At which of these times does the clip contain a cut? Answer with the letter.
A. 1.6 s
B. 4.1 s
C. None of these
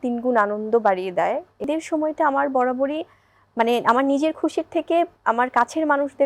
A